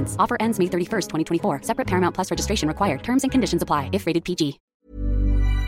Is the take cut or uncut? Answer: cut